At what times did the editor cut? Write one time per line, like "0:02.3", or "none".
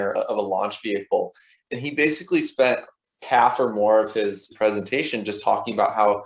none

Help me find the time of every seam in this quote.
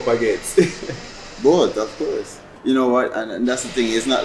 0:02.5

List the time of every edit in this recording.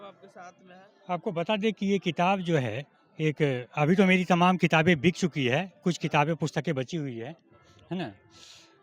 none

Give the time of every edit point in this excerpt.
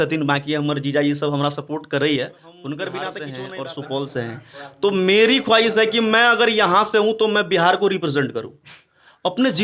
0:03.2

